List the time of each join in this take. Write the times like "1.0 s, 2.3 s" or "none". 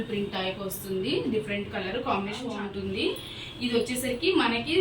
2.6 s